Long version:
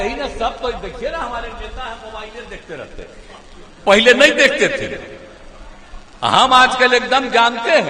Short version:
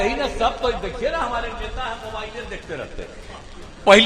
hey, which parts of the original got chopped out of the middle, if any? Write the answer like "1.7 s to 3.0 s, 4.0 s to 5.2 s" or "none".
none

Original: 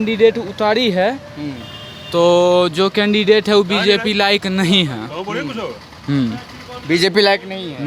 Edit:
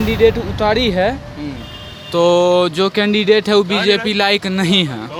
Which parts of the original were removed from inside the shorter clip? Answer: none

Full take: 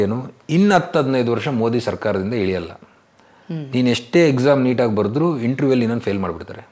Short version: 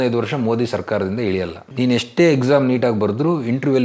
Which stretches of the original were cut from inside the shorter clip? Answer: 2.8 s to 3.6 s

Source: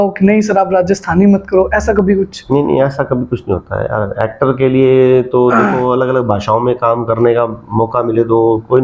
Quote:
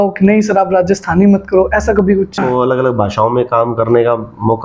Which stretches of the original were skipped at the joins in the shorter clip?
2.4 s to 5.7 s

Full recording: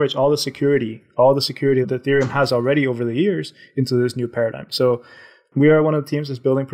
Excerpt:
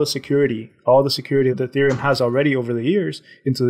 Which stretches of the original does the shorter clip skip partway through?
none

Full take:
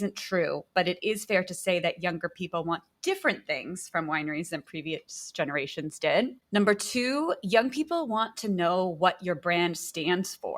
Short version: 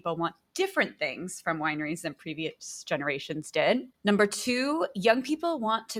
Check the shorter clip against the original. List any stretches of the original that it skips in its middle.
none

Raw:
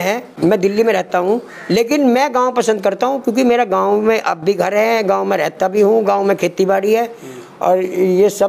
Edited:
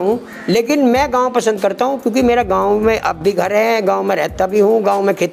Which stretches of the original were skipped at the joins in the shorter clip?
none

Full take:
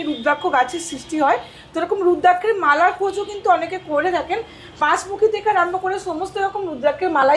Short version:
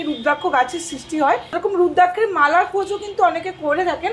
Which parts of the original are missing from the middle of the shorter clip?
1.5 s to 1.8 s

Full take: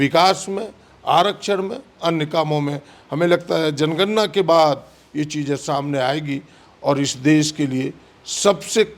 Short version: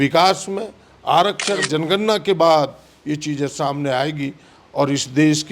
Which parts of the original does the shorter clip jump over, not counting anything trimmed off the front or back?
1.6 s to 3.7 s

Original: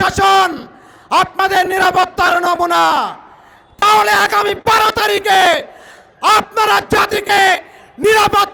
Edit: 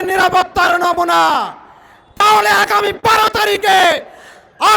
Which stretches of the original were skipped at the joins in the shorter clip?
none

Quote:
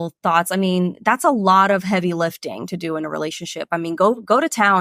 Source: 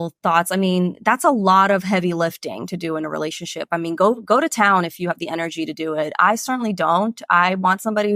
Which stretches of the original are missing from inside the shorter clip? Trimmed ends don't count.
none

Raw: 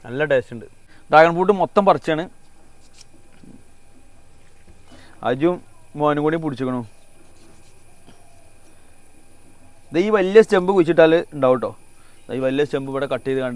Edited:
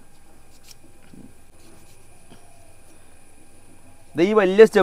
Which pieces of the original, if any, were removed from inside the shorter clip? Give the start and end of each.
3.8 s to 7.3 s

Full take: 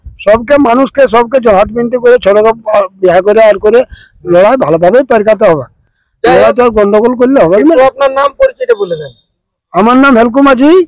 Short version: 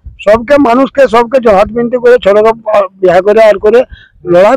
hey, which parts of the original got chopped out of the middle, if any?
none

